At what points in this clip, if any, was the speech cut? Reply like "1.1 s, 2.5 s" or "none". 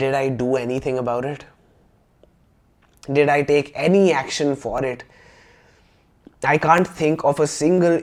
none